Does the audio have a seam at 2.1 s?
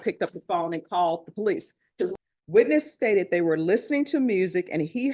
yes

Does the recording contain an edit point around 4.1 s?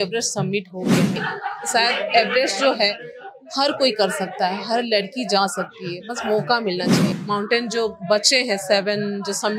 no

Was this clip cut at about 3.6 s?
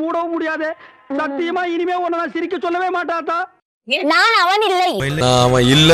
yes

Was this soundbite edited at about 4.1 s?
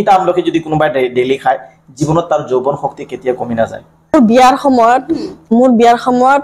yes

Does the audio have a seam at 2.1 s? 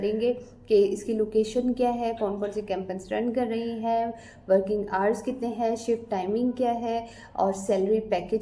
no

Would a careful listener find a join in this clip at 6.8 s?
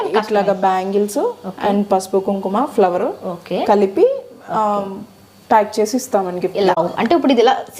yes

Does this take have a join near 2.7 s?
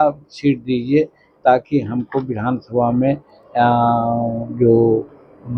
no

